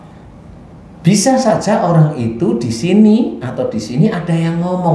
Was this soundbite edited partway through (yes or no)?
no